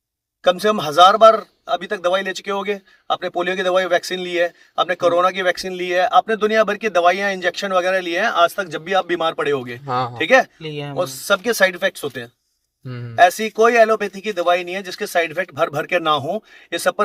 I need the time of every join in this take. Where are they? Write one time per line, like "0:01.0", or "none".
none